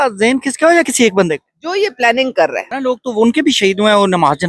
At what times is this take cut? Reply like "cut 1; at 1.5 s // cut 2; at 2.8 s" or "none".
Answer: cut 1; at 2.7 s